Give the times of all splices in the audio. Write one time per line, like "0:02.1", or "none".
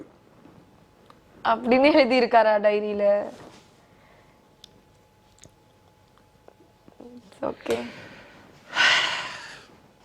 none